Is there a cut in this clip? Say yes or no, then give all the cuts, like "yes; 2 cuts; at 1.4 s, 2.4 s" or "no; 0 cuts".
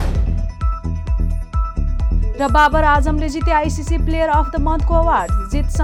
no; 0 cuts